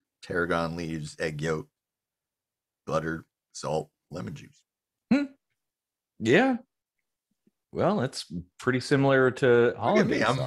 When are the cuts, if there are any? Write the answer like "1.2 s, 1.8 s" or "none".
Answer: none